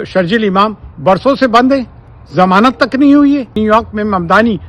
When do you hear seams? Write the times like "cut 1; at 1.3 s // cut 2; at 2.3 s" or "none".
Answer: cut 1; at 3.6 s